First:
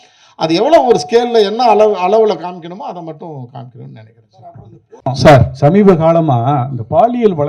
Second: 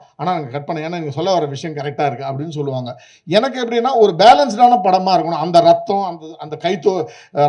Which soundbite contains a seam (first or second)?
first